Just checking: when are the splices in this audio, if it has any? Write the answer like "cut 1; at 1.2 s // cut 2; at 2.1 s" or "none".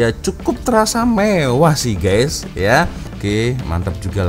cut 1; at 3.1 s